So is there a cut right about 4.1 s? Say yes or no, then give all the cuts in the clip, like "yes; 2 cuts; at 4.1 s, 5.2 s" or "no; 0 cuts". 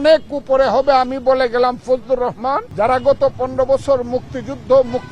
no; 1 cut; at 2.7 s